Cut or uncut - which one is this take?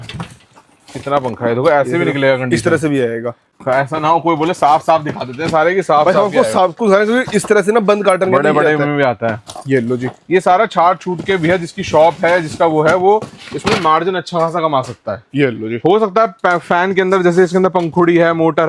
uncut